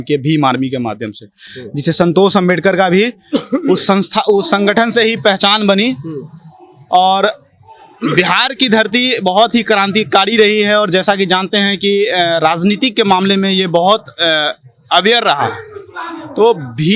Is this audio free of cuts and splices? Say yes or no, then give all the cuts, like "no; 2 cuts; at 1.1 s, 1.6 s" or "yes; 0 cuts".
yes; 0 cuts